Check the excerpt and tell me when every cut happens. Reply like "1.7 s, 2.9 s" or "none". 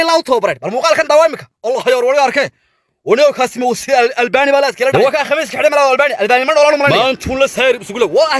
none